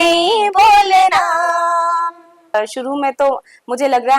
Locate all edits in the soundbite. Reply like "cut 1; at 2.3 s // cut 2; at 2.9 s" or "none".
cut 1; at 2.5 s